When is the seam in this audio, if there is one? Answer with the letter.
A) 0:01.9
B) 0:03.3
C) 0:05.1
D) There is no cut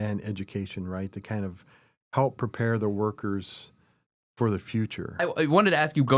C